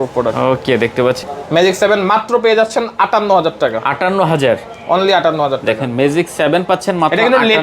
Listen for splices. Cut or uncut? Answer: cut